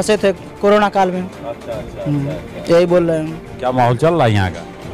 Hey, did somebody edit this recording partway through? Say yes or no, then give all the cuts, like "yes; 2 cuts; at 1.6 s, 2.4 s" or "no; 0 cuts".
no; 0 cuts